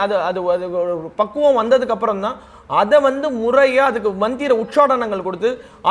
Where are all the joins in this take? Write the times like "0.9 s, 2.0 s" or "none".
none